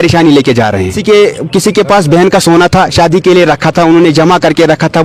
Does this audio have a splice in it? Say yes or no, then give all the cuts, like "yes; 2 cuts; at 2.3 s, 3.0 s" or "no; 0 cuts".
no; 0 cuts